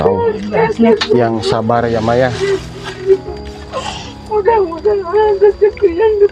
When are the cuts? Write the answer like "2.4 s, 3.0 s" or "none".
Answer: none